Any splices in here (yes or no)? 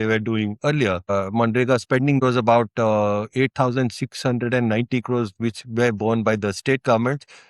yes